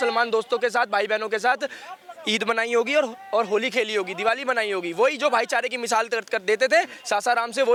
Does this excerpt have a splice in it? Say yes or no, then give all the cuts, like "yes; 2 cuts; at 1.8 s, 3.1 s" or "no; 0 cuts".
no; 0 cuts